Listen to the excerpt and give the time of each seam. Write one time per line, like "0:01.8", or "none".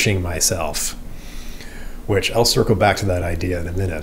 none